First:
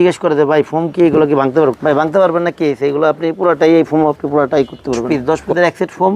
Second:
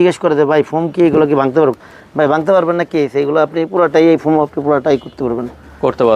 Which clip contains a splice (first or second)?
first